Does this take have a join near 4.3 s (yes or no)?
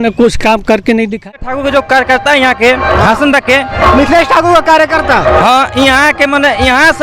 no